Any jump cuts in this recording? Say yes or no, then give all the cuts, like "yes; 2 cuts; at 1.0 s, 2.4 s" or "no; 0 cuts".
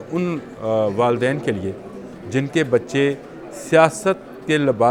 no; 0 cuts